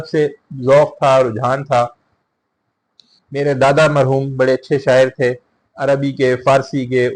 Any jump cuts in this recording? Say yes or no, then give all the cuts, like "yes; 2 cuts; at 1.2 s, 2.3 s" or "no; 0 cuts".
no; 0 cuts